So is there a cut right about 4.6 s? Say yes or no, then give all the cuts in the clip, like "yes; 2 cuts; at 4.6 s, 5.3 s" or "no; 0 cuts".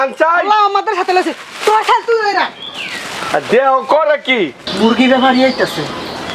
yes; 1 cut; at 4.6 s